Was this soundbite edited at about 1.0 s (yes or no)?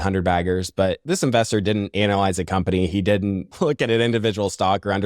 yes